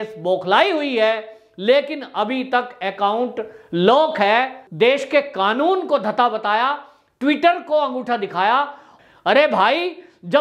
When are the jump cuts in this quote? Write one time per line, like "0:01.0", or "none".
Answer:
0:04.6
0:08.8